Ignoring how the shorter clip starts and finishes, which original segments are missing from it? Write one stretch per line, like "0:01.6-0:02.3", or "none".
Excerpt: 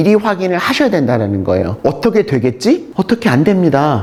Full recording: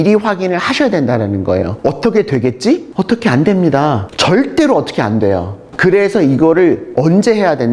none